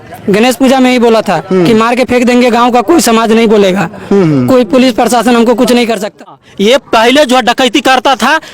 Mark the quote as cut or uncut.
cut